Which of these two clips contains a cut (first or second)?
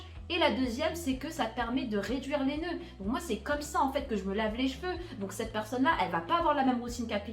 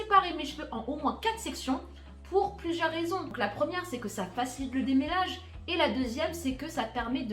second